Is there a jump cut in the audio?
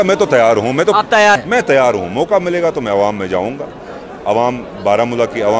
yes; 1 cut; at 1.4 s

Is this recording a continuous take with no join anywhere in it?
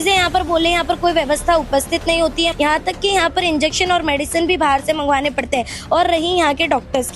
no; 1 cut; at 2.5 s

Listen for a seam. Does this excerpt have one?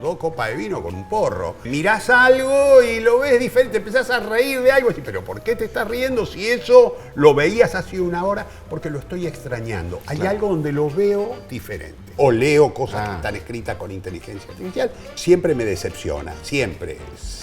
yes; 3 cuts; at 1.6 s, 12.1 s, 15.0 s

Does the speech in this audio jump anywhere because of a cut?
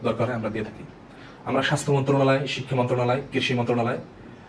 no; 0 cuts

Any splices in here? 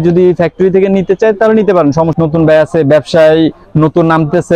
yes; 1 cut; at 2.1 s

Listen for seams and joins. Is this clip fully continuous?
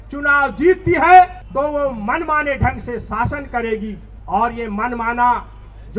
no; 2 cuts; at 1.4 s, 4.1 s

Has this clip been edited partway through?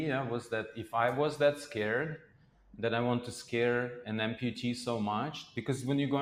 no; 0 cuts

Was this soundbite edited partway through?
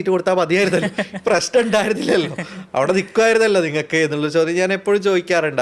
no; 0 cuts

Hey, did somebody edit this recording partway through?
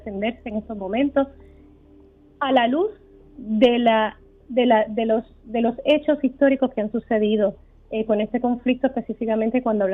no; 0 cuts

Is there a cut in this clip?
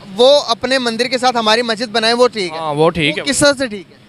no; 0 cuts

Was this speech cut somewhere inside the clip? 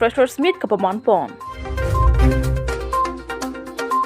yes; 1 cut; at 1.7 s

